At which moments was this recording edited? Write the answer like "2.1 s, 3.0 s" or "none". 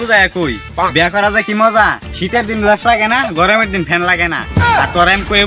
none